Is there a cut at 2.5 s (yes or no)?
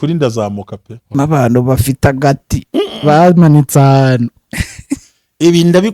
no